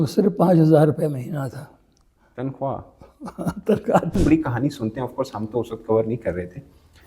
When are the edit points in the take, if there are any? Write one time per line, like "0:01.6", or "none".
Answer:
0:04.2